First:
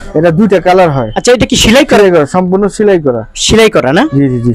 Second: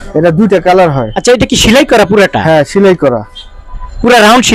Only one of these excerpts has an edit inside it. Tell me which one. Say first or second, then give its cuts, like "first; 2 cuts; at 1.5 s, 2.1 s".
first; 1 cut; at 2.0 s